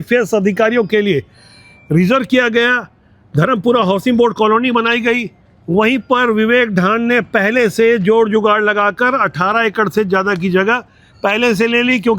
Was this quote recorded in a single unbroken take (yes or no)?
yes